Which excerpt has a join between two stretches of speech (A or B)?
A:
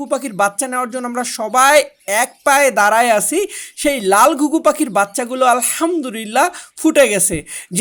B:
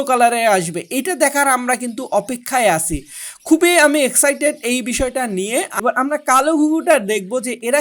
B